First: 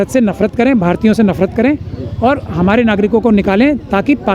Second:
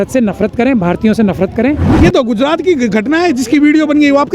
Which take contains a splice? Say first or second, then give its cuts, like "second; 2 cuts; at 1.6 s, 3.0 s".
second; 1 cut; at 1.9 s